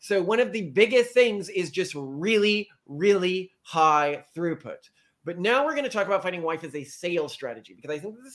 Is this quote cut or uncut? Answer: uncut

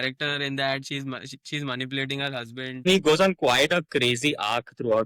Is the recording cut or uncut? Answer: cut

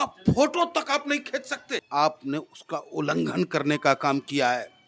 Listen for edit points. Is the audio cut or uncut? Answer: cut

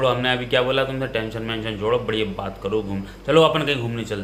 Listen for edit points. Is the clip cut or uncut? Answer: uncut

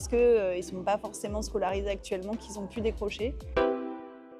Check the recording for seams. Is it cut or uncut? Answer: cut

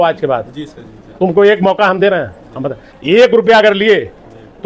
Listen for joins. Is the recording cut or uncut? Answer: uncut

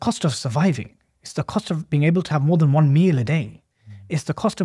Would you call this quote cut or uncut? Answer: uncut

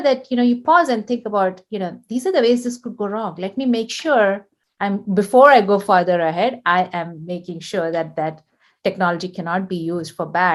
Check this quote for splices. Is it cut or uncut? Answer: uncut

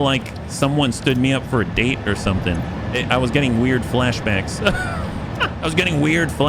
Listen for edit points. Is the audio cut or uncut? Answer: cut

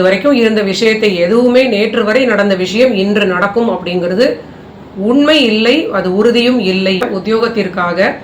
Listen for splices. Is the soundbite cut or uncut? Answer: cut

